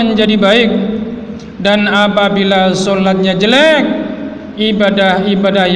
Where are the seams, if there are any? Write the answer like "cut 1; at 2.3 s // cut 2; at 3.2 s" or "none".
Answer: none